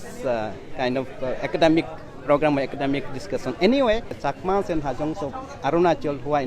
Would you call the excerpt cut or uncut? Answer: cut